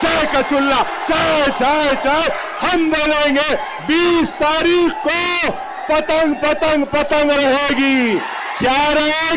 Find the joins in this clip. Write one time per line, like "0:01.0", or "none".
none